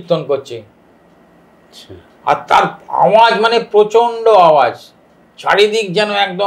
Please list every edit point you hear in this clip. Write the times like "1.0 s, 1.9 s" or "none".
none